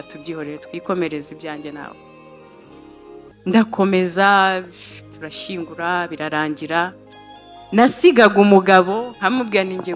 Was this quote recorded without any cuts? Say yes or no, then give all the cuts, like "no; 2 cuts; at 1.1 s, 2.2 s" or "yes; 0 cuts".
no; 2 cuts; at 1.9 s, 3.4 s